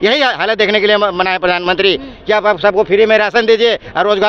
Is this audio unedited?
yes; 0 cuts

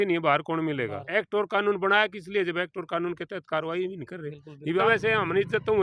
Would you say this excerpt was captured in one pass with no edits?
no; 2 cuts; at 1.0 s, 4.8 s

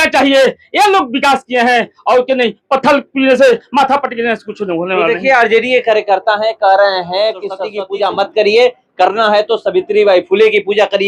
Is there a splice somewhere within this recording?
no; 0 cuts

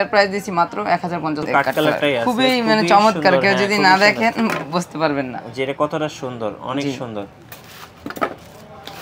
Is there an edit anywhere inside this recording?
yes; 1 cut; at 1.4 s

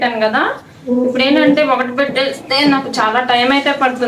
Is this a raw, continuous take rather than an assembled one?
yes; 0 cuts

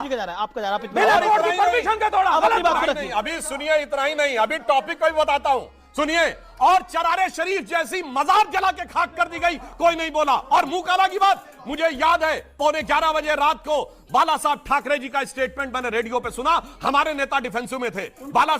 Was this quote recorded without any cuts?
yes; 0 cuts

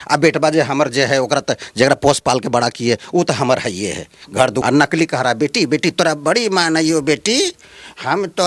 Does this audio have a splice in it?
yes; 1 cut; at 4.6 s

